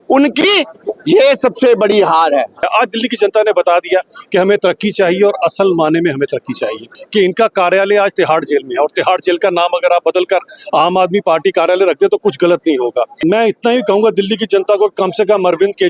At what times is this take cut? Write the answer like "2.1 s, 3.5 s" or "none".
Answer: 2.6 s, 7.0 s, 13.1 s